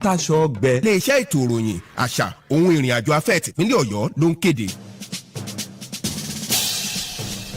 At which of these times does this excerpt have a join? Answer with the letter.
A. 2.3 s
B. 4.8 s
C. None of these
B